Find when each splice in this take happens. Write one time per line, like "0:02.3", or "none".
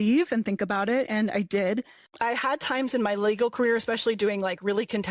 0:02.0